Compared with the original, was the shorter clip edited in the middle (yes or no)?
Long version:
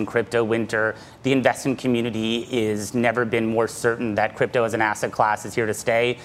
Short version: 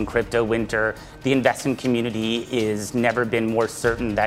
no